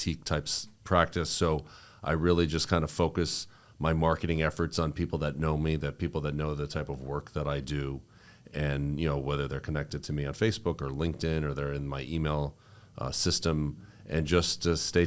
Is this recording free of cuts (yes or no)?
yes